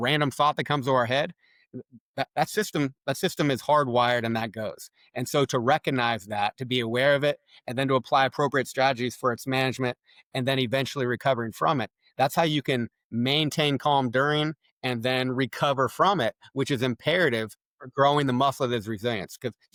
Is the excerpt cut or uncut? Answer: uncut